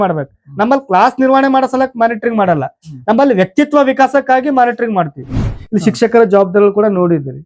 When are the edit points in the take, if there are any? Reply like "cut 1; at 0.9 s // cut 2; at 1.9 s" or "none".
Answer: cut 1; at 5.5 s

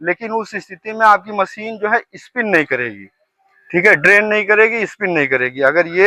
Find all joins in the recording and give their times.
none

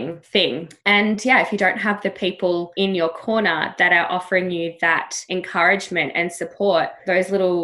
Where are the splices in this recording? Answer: cut 1; at 2.7 s // cut 2; at 5.1 s

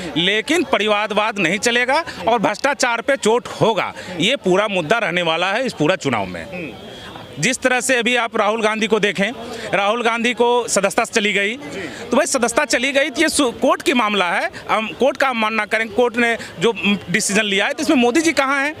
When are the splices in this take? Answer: none

